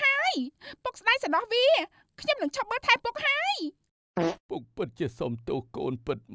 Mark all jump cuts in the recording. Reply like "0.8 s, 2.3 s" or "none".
4.4 s